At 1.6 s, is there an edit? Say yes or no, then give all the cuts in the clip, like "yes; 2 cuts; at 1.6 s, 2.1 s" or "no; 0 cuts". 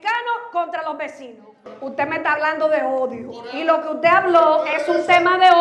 yes; 1 cut; at 1.6 s